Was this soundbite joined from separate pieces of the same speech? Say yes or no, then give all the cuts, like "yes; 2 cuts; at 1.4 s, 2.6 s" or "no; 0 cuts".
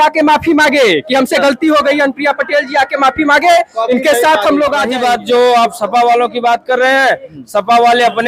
yes; 1 cut; at 4.9 s